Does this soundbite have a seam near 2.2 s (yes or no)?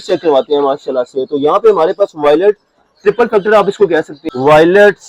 no